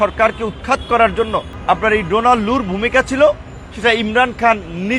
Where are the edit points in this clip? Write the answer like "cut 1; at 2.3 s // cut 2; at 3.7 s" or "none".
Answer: cut 1; at 1.5 s